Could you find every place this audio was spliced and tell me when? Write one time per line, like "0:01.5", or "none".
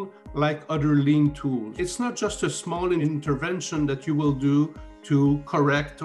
0:01.7
0:03.0